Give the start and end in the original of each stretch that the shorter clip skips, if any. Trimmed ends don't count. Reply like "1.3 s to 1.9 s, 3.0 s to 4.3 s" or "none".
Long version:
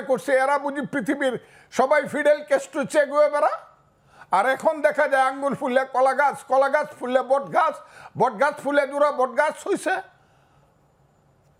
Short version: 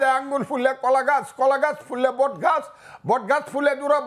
none